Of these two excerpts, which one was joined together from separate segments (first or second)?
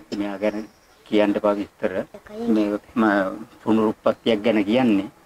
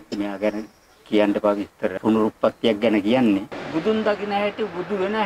second